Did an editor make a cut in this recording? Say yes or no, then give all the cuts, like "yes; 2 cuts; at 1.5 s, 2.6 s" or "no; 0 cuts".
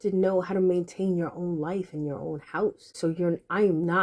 yes; 1 cut; at 2.9 s